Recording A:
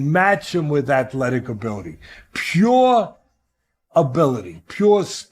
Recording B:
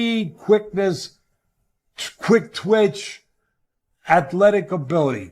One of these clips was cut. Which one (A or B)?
A